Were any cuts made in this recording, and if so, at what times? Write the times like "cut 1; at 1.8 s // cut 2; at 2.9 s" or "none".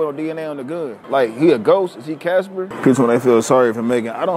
cut 1; at 1.0 s // cut 2; at 2.7 s